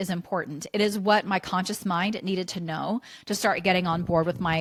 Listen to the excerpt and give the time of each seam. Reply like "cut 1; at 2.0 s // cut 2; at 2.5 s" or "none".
none